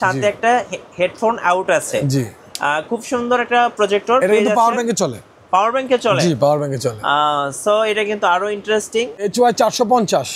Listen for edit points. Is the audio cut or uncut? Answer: cut